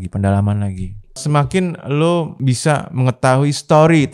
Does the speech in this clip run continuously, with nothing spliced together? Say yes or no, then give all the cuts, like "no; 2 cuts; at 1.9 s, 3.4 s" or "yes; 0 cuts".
no; 2 cuts; at 1.2 s, 2.5 s